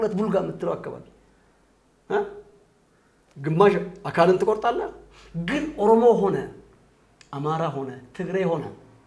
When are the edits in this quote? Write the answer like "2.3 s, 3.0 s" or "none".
none